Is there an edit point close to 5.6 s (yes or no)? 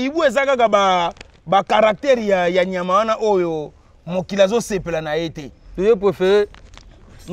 yes